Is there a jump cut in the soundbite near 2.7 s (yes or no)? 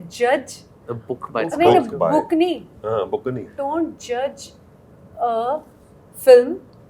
no